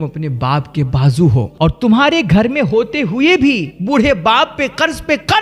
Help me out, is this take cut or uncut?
cut